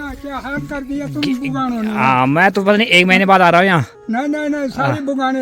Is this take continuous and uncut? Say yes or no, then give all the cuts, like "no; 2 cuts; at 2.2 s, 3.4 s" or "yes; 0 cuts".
yes; 0 cuts